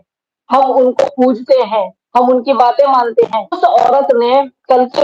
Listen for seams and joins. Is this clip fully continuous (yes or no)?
no